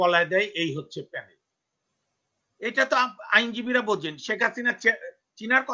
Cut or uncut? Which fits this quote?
uncut